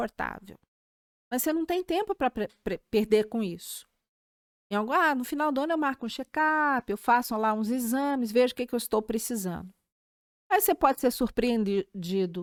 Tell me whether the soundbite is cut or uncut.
uncut